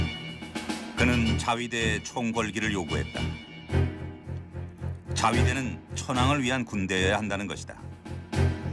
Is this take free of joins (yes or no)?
yes